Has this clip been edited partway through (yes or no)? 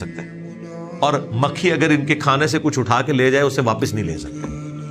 no